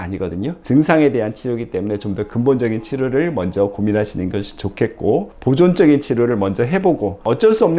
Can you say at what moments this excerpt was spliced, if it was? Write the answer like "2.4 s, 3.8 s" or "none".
none